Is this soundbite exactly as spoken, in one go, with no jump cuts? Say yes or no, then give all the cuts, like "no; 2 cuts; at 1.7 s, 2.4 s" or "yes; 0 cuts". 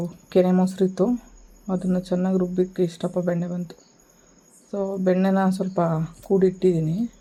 yes; 0 cuts